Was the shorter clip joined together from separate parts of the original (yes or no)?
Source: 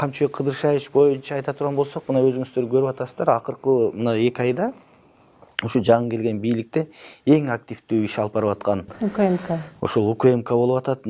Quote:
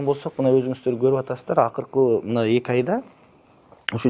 no